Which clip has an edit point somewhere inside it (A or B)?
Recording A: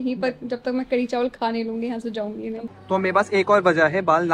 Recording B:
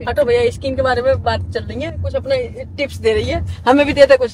A